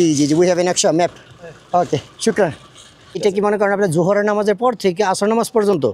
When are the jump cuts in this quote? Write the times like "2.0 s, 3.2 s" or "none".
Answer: 3.2 s